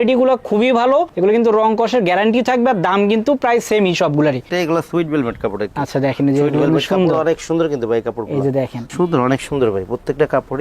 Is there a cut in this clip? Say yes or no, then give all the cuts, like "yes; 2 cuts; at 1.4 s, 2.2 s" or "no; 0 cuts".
yes; 2 cuts; at 4.5 s, 8.9 s